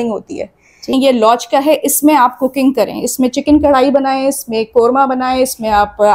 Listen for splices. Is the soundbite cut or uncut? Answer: cut